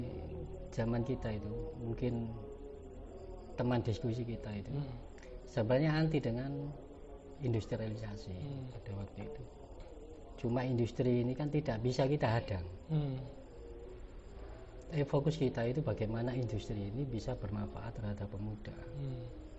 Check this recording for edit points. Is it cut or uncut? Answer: uncut